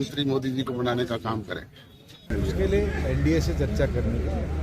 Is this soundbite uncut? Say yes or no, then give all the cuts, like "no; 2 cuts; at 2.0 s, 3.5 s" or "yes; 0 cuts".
no; 1 cut; at 2.3 s